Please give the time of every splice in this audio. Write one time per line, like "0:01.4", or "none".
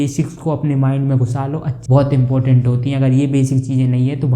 0:01.7